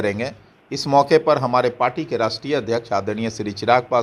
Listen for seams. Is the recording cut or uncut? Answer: uncut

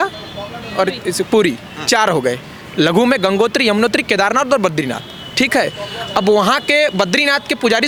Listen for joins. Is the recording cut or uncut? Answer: uncut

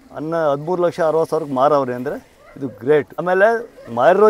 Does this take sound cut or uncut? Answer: cut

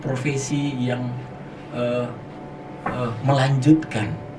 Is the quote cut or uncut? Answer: uncut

